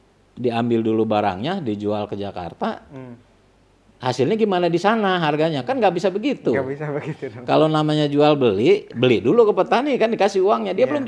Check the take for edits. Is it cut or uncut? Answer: uncut